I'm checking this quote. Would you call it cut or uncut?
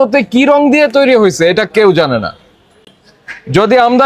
uncut